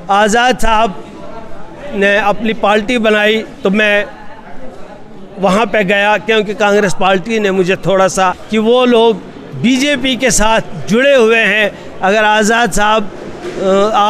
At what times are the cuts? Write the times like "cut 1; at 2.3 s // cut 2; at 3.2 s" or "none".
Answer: cut 1; at 8.4 s